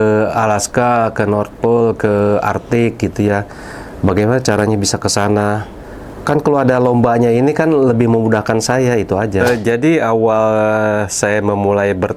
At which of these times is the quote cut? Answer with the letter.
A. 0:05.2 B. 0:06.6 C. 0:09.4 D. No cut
C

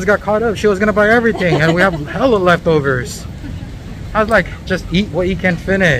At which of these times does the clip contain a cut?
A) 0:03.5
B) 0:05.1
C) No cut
C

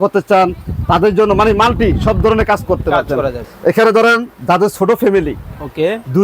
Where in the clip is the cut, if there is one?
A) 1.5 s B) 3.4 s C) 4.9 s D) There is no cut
B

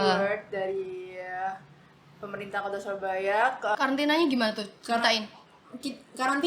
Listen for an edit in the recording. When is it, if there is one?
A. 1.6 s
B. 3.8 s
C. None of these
B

